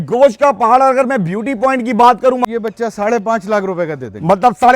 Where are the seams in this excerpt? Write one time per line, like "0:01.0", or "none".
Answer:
0:02.4